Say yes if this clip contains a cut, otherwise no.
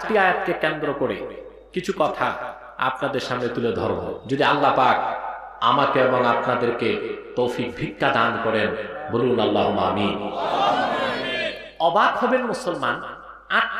yes